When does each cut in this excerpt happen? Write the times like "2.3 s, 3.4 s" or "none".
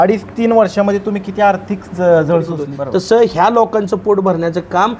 3.0 s